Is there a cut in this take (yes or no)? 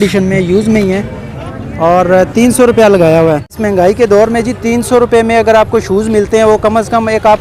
yes